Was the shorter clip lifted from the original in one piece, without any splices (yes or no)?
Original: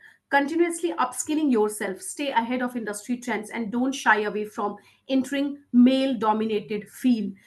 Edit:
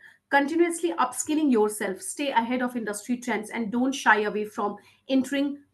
yes